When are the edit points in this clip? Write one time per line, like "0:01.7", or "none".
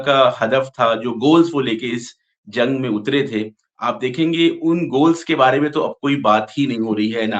none